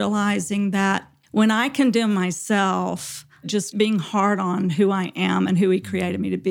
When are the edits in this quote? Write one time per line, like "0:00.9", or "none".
0:01.1
0:03.7